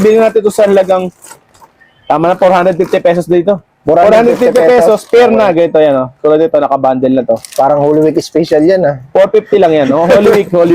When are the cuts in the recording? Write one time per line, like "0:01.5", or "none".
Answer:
none